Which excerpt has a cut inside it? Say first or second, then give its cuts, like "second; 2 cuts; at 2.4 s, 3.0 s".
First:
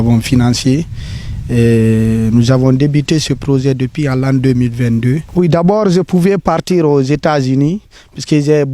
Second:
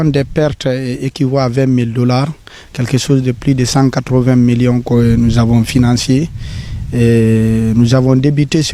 first; 1 cut; at 5.2 s